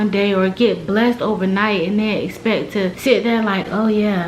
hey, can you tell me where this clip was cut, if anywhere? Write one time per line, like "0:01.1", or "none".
0:03.0